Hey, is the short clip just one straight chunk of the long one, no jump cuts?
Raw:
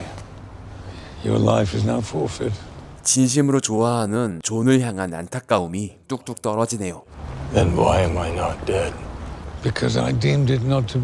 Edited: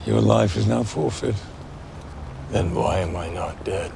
no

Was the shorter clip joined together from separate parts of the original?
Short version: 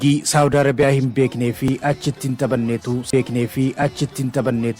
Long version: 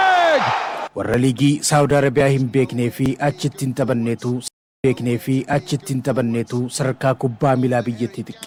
yes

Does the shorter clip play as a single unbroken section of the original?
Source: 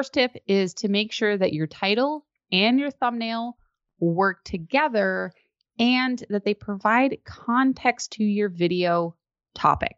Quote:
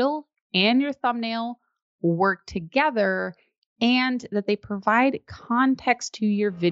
yes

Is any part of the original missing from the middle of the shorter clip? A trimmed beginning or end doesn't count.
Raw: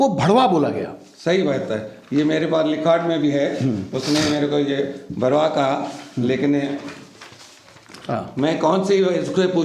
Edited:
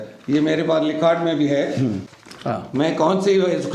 yes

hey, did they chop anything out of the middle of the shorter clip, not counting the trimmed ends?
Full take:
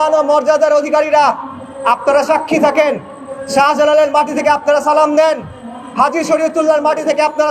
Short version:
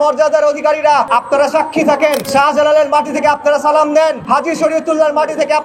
yes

